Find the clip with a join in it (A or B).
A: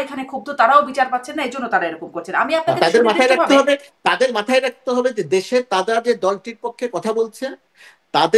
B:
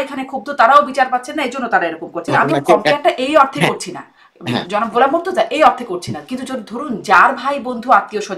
B